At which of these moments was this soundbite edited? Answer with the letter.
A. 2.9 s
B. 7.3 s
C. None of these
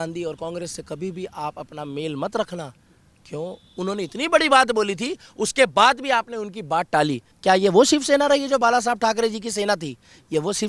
B